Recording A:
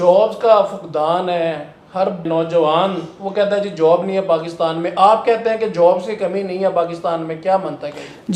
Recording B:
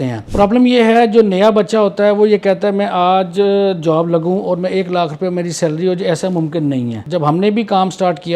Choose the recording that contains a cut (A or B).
B